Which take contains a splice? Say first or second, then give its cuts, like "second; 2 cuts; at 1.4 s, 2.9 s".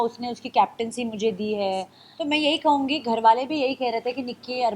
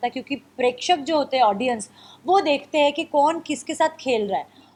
first; 1 cut; at 2.0 s